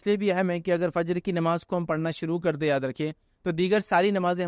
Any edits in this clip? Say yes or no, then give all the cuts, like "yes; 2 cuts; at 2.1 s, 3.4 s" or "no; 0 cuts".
no; 0 cuts